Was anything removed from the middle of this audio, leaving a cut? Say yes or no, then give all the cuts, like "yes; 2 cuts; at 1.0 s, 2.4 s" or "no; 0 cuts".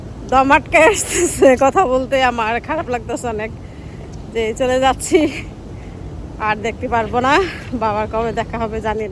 no; 0 cuts